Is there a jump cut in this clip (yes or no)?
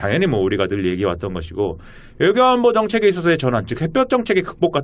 no